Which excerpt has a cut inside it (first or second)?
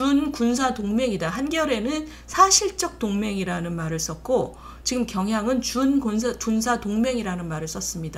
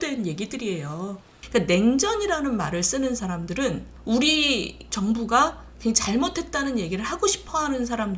second